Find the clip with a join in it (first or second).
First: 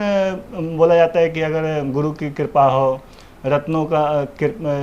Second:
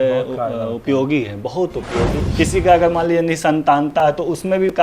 second